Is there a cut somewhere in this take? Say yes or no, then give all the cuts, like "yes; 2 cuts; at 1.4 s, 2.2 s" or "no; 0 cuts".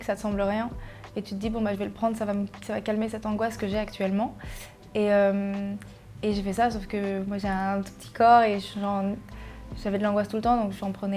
no; 0 cuts